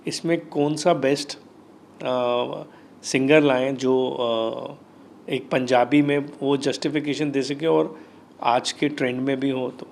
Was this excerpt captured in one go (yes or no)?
yes